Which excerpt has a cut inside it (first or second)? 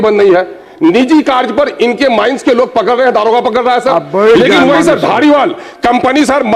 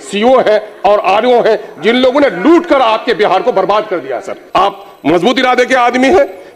second